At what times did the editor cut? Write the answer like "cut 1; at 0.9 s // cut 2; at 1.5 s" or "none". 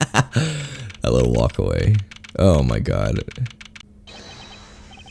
cut 1; at 3.8 s